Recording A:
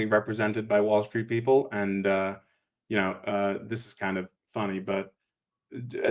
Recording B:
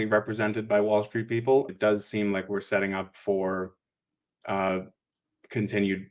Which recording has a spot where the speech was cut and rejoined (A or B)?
B